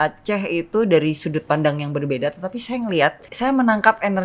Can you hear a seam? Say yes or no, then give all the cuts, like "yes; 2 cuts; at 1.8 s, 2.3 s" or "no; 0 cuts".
yes; 1 cut; at 3.3 s